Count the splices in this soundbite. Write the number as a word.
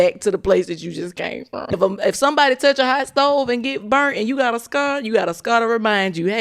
one